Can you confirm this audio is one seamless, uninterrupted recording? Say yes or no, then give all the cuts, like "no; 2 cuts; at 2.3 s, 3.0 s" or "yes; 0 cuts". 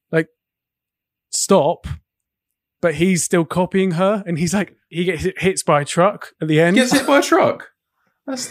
no; 1 cut; at 4.9 s